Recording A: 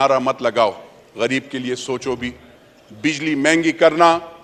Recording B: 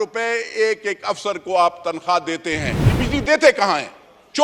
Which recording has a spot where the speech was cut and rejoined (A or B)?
B